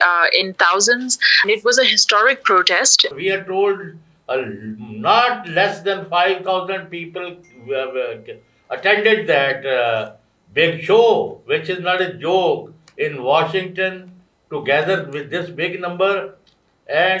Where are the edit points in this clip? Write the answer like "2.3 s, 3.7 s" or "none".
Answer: 1.4 s, 3.1 s

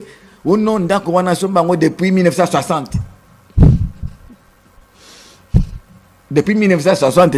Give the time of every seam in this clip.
none

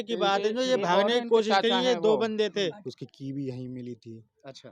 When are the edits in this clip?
2.8 s

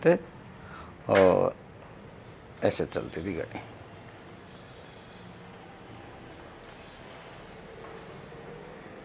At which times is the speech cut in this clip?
none

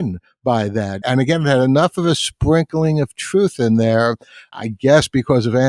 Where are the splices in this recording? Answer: 1.0 s, 4.5 s

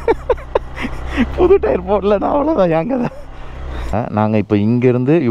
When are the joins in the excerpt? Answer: 3.9 s

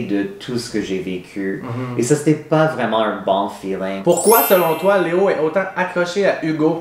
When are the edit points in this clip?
3.9 s

